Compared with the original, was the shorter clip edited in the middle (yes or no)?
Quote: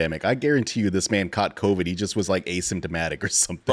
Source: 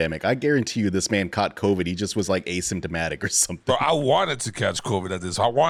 no